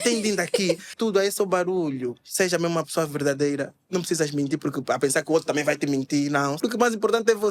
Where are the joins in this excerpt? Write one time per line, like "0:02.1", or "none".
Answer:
0:00.9
0:06.6